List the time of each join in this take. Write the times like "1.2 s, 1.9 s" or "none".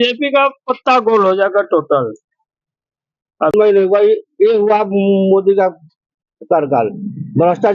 3.5 s